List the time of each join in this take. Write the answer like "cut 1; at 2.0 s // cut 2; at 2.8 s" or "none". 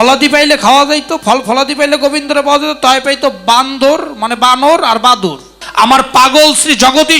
cut 1; at 5.6 s